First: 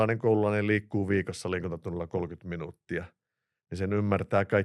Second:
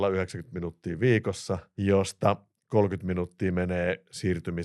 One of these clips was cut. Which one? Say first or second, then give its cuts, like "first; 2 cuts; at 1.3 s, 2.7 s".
second; 1 cut; at 1.7 s